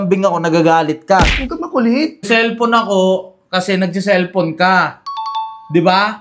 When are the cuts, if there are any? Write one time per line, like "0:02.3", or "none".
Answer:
0:02.2